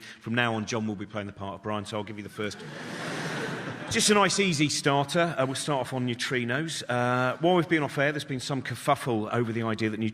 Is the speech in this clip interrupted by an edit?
no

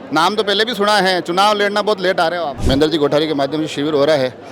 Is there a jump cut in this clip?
yes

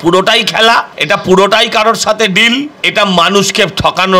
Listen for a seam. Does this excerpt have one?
yes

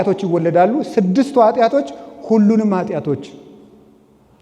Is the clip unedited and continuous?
yes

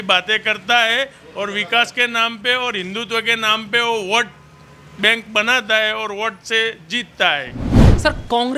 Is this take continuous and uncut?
yes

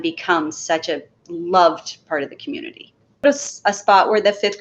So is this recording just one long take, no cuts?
no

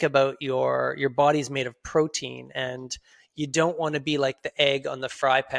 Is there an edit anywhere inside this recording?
no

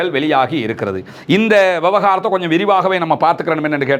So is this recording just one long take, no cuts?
yes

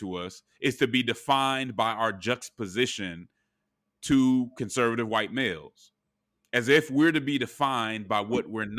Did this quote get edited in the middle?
no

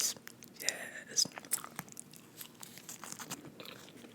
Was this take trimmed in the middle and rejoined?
yes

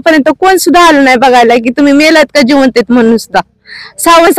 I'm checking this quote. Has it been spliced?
no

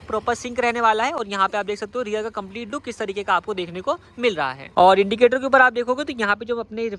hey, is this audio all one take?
yes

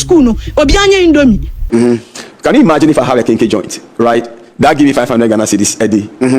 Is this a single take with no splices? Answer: no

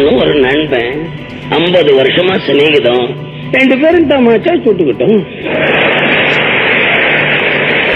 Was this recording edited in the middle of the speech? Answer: no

